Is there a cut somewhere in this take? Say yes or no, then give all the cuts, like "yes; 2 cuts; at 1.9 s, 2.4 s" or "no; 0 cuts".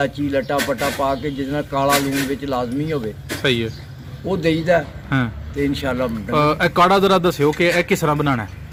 no; 0 cuts